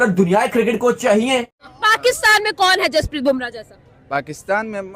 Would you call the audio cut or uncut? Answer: cut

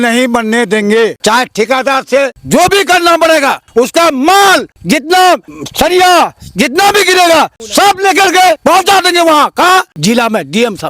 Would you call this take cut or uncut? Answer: cut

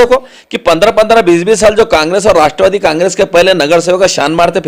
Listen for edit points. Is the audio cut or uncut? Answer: uncut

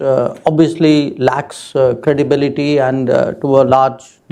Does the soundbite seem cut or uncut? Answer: uncut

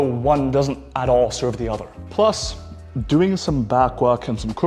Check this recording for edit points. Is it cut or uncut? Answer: uncut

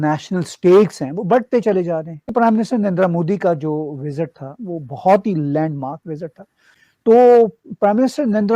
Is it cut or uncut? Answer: cut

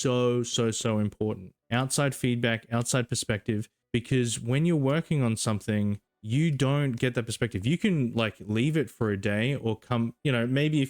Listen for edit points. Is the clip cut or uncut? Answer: cut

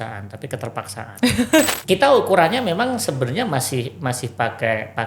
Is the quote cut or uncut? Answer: cut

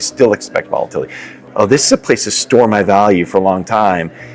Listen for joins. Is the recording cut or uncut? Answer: cut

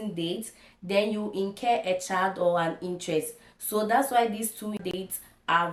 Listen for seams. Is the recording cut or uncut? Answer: uncut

